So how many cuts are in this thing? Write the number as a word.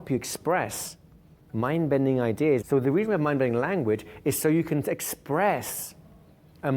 one